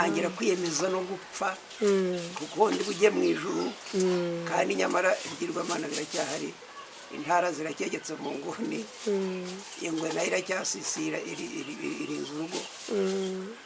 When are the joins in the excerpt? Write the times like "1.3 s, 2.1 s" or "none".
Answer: none

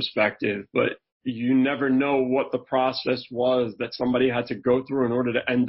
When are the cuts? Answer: none

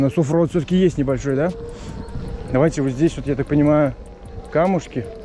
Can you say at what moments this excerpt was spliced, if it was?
none

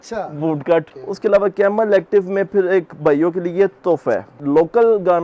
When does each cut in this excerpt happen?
1.0 s, 4.3 s

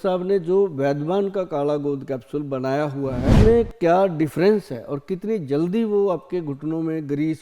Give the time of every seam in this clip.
3.3 s

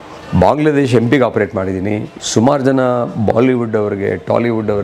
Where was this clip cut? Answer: 2.1 s

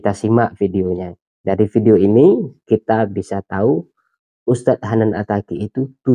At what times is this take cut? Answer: none

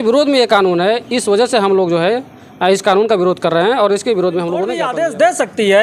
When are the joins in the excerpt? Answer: 4.9 s

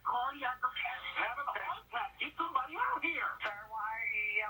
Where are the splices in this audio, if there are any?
3.4 s

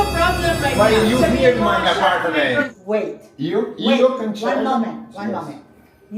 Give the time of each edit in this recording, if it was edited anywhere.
1.3 s, 2.7 s

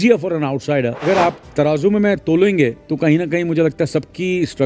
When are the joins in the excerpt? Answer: 1.0 s, 2.8 s

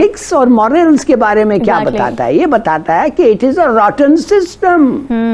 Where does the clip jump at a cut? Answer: none

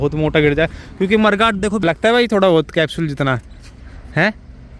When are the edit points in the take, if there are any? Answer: 1.8 s

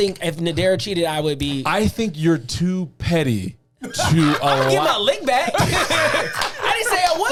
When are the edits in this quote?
none

